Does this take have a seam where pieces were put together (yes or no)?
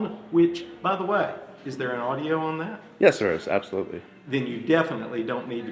no